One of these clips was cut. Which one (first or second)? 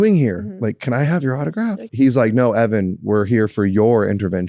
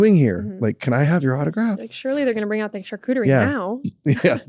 first